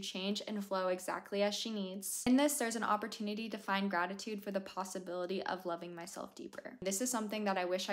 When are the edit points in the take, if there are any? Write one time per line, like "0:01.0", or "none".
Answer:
0:02.1
0:06.6